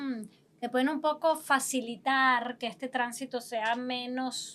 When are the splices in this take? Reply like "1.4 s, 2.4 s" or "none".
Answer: none